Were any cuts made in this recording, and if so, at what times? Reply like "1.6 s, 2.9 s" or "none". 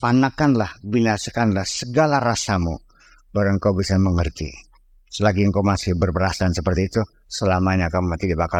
none